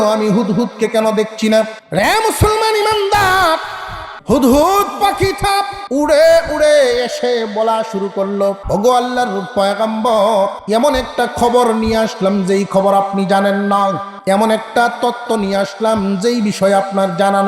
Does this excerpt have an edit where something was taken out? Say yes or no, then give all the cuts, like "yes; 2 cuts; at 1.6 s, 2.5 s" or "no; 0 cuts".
yes; 1 cut; at 4.1 s